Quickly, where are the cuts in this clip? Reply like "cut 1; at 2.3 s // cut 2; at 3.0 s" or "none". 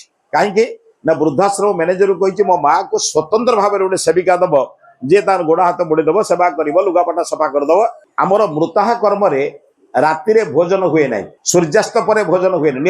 cut 1; at 8.0 s